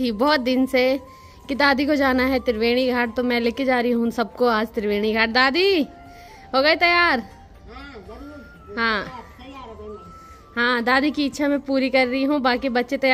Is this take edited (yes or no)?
no